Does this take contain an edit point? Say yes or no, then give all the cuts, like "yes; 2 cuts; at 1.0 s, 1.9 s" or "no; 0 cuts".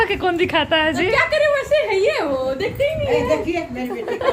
no; 0 cuts